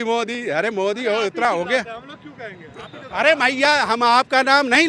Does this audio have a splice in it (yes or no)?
no